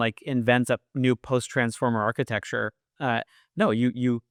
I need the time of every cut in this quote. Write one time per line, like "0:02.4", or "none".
none